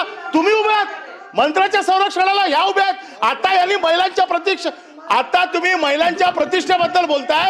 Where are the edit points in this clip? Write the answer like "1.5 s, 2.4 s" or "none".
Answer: none